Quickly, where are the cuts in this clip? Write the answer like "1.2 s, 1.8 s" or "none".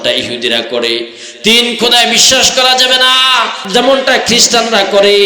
3.6 s